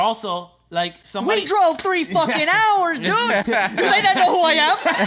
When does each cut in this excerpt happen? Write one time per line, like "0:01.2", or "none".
none